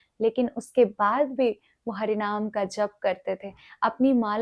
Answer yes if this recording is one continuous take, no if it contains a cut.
yes